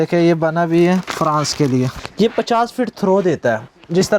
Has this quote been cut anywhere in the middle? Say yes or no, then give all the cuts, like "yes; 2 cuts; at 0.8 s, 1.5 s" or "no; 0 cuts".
yes; 1 cut; at 1.9 s